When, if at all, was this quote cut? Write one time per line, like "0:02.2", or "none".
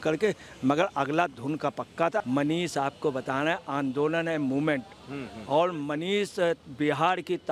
0:02.2

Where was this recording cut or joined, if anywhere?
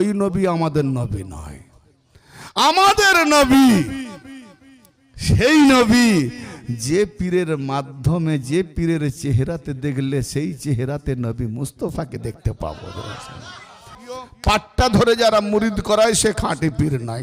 0:14.1

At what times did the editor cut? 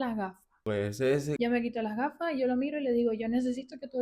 0:01.0

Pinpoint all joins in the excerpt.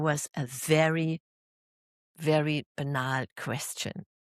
none

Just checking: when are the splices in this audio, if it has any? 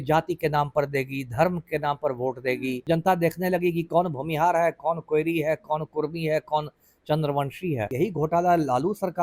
0:02.8
0:07.9

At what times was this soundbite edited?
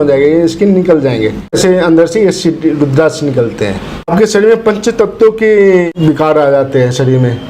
0:01.6
0:04.1
0:05.9

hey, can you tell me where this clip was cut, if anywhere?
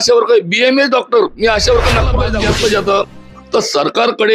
0:02.3

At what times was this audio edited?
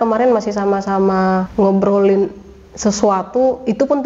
0:01.5

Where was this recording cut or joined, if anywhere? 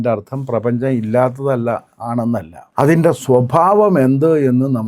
0:02.6

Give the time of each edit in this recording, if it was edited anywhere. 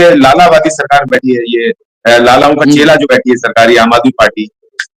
none

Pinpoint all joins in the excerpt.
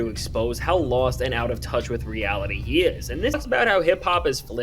0:03.3

